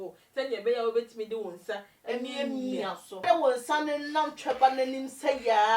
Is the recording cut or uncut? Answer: cut